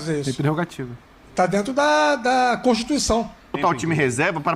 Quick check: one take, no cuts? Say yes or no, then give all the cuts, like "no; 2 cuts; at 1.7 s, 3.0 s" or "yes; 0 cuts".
no; 1 cut; at 3.6 s